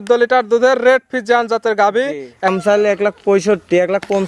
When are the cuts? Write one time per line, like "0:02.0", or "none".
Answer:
0:02.5